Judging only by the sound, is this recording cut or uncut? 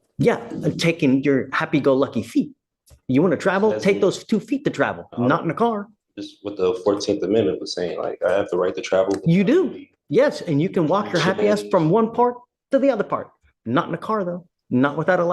uncut